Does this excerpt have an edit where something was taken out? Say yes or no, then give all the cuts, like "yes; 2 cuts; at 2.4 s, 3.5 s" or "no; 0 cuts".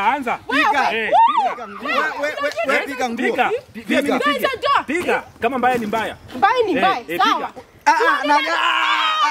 no; 0 cuts